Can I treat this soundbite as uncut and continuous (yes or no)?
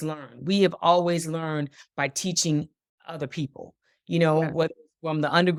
yes